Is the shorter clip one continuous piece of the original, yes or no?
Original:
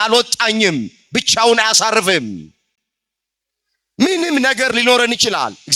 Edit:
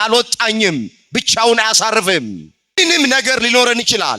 no